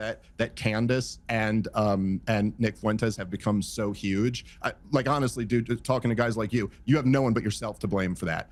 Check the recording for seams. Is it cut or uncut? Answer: uncut